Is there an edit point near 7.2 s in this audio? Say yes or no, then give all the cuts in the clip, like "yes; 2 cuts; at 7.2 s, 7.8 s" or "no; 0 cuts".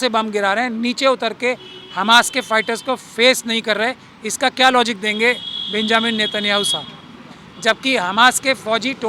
no; 0 cuts